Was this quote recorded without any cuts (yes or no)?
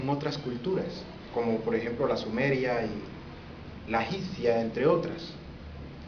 yes